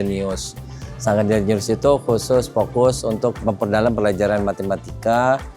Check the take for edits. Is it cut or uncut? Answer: cut